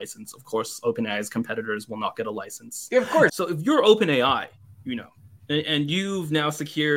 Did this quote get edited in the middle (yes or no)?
yes